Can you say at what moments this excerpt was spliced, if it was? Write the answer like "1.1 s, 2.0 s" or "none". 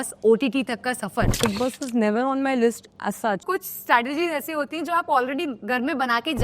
1.4 s, 3.4 s